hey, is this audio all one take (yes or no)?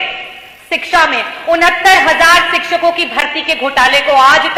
yes